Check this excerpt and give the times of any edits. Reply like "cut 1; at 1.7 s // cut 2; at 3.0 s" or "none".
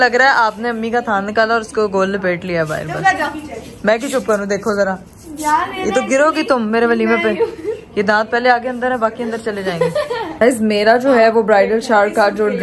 none

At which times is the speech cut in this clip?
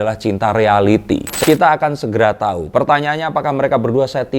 cut 1; at 1.3 s

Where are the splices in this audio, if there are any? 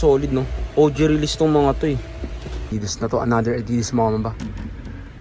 cut 1; at 2.7 s

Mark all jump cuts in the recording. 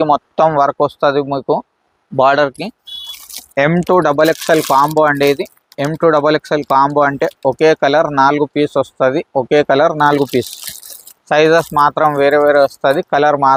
none

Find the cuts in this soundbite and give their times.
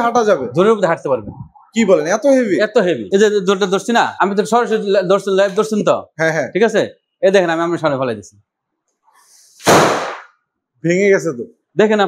cut 1; at 3.0 s // cut 2; at 4.1 s

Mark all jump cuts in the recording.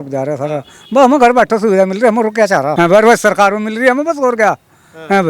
cut 1; at 2.7 s

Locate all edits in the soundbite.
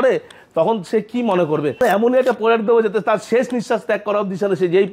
cut 1; at 1.8 s

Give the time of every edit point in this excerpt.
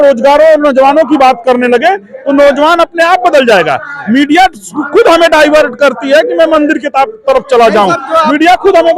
none

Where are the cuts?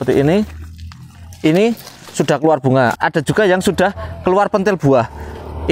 none

